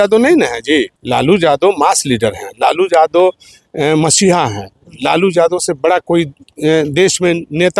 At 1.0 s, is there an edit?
no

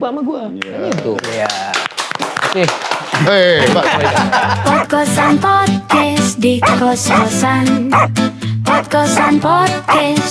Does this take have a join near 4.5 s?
yes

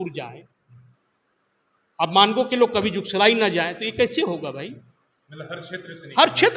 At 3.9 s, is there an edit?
no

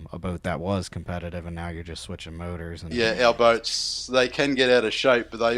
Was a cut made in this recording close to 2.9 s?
yes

